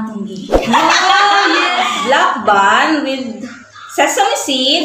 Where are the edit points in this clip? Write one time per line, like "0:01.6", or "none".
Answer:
0:01.9